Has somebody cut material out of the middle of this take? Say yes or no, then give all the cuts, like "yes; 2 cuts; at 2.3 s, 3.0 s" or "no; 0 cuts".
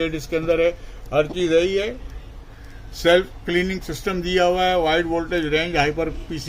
no; 0 cuts